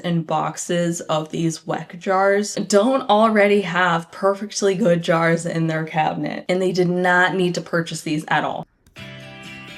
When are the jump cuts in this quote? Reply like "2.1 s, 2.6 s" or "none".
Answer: 8.6 s